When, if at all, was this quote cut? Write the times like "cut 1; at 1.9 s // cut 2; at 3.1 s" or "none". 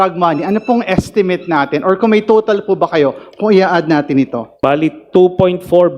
cut 1; at 4.5 s